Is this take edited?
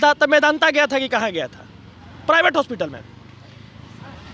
no; 0 cuts

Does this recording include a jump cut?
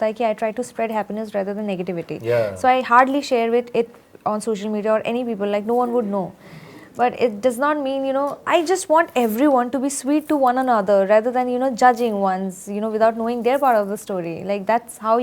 no; 0 cuts

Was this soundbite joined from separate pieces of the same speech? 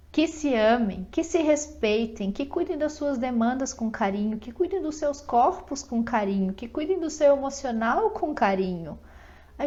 no; 0 cuts

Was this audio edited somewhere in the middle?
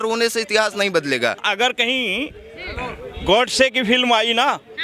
yes; 1 cut; at 1.4 s

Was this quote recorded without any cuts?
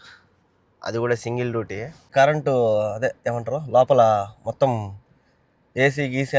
no; 1 cut; at 2.1 s

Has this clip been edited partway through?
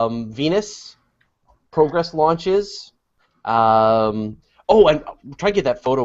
yes; 1 cut; at 4.9 s

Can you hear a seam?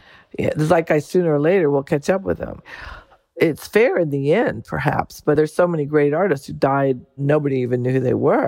yes; 3 cuts; at 3.4 s, 5.4 s, 7.2 s

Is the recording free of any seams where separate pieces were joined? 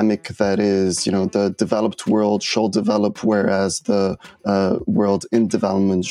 yes; 0 cuts

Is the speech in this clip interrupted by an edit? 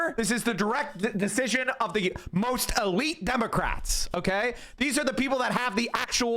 no; 0 cuts

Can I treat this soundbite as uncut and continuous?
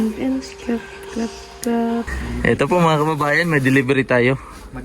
no; 1 cut; at 2.2 s

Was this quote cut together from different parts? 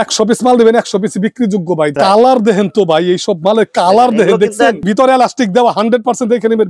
yes; 2 cuts; at 2.0 s, 4.8 s

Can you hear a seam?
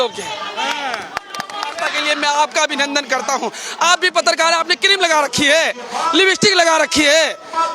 yes; 1 cut; at 1.9 s

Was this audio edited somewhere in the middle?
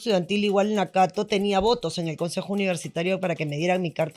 no; 0 cuts

